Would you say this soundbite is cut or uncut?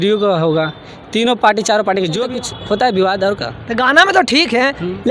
cut